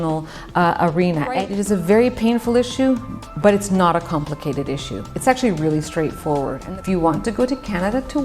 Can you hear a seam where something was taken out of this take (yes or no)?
yes